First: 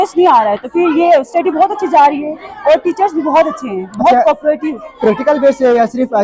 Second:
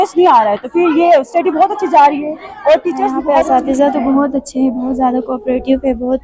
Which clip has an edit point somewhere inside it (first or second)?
second